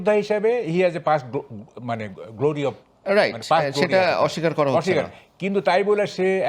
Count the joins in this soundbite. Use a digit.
0